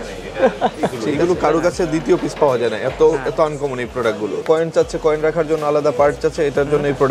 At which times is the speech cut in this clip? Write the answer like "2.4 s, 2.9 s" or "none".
1.0 s, 4.4 s